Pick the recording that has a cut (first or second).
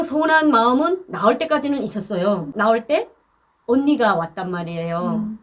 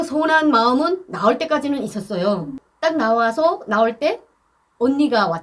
first